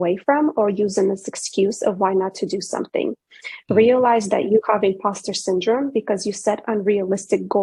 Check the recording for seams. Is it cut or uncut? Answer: uncut